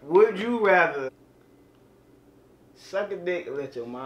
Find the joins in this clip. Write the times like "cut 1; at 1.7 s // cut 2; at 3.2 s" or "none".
cut 1; at 1.1 s

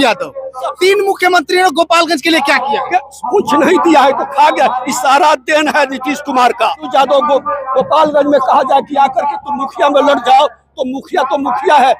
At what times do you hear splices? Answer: cut 1; at 6.9 s

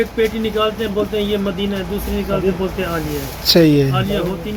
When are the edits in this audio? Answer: none

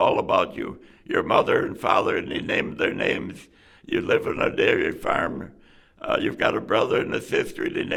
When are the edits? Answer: none

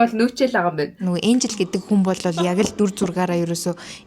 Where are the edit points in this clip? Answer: cut 1; at 1.1 s

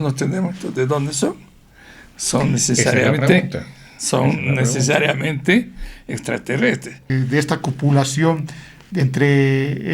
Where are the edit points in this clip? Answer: cut 1; at 7.1 s

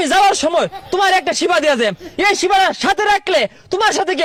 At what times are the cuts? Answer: none

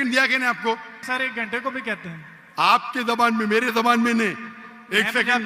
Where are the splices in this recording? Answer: cut 1; at 1.0 s

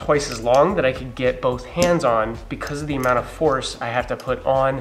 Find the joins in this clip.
none

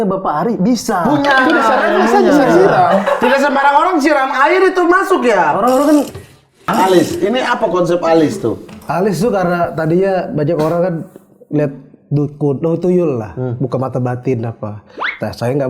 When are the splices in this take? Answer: cut 1; at 6.5 s

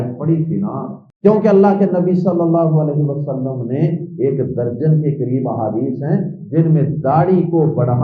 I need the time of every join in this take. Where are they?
cut 1; at 1.0 s

